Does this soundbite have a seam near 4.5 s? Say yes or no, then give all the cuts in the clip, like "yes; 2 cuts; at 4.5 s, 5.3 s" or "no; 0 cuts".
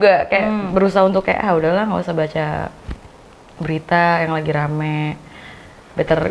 no; 0 cuts